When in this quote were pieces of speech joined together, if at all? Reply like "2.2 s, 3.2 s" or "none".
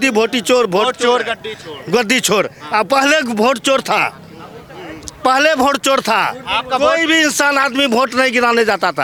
none

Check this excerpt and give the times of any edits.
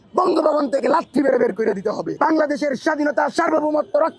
2.1 s

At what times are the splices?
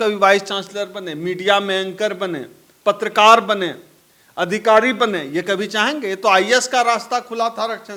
none

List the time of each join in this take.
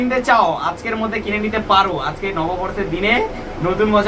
none

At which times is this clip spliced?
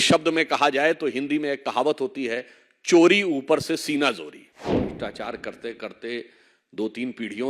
4.8 s

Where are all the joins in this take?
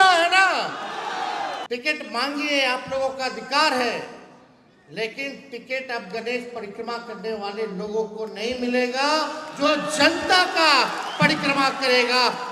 1.6 s

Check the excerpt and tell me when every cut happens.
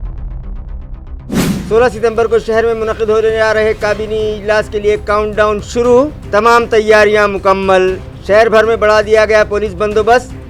1.4 s

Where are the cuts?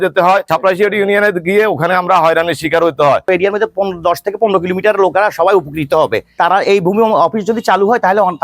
3.2 s

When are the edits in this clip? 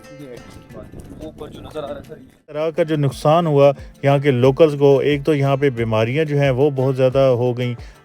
2.6 s

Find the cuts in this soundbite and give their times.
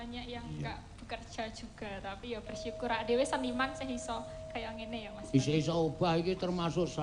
none

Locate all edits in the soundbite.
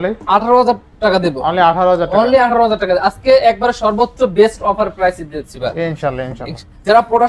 none

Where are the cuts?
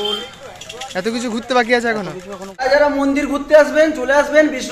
2.6 s

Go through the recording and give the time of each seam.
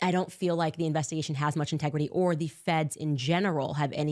none

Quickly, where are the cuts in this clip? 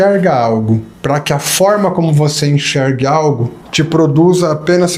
0.9 s, 3.6 s

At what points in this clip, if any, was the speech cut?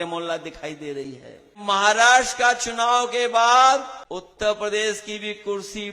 1.6 s, 4.0 s

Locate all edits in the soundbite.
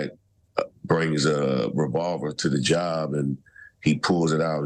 none

